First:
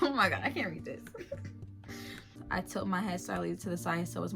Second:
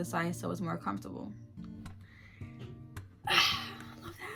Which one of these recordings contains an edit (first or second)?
first